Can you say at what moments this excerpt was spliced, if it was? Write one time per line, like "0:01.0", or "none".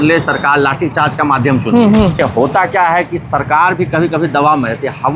0:02.2